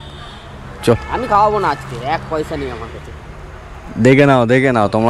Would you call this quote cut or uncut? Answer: uncut